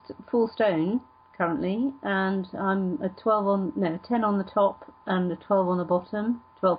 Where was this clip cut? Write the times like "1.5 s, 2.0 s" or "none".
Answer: none